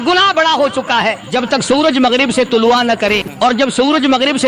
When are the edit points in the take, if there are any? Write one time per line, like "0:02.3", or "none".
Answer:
0:01.2
0:03.5